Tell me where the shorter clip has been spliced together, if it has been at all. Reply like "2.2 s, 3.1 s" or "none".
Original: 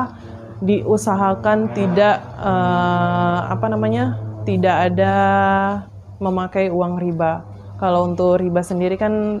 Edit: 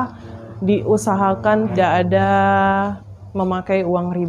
1.7 s